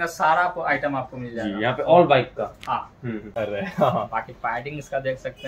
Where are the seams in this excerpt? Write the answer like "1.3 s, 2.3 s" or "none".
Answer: 3.2 s